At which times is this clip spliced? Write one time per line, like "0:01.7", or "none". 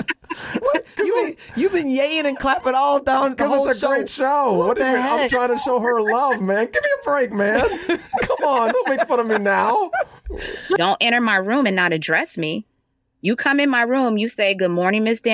0:10.8